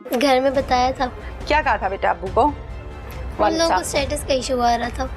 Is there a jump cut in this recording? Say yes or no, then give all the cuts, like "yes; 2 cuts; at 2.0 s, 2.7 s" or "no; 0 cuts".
yes; 1 cut; at 1.2 s